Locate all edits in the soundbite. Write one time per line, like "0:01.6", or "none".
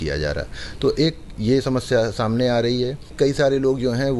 0:03.0